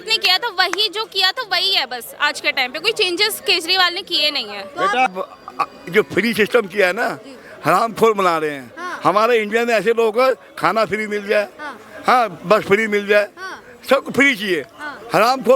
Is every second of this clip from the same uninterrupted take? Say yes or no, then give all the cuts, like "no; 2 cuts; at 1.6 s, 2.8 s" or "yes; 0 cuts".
no; 1 cut; at 5.1 s